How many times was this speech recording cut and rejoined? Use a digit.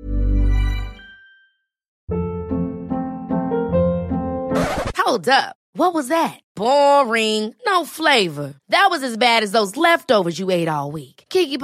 1